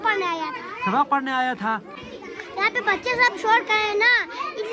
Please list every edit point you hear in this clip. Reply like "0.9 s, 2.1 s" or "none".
1.9 s